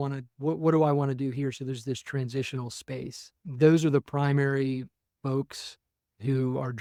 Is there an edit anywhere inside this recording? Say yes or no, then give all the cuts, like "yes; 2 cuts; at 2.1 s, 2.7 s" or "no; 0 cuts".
no; 0 cuts